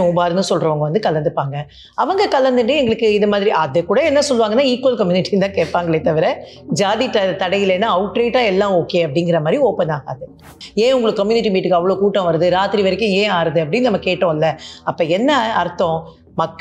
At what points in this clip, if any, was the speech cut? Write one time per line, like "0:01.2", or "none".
0:10.5